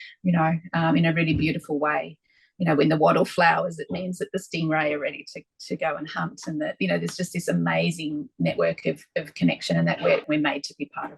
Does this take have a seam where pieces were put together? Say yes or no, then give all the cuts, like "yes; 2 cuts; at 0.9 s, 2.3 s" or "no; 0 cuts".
yes; 1 cut; at 10.2 s